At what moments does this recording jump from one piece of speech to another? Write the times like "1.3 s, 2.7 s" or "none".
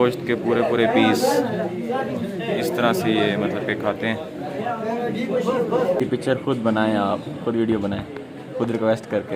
6.0 s